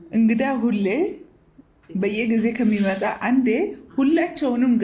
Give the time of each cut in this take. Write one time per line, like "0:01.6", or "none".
none